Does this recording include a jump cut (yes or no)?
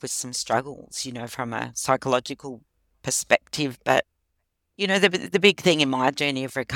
no